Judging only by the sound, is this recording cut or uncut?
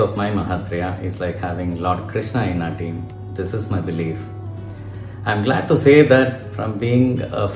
uncut